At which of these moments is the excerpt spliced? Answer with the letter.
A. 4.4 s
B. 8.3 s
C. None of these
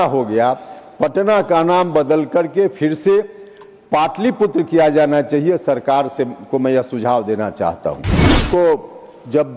B